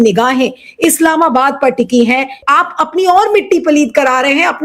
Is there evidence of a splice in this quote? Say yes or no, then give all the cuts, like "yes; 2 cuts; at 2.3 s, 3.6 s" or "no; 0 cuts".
yes; 1 cut; at 2.4 s